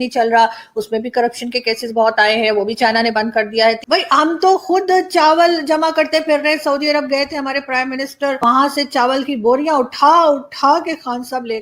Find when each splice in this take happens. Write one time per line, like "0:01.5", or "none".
0:03.8
0:08.4